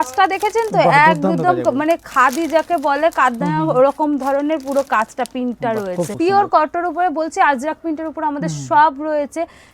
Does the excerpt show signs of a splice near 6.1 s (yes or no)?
yes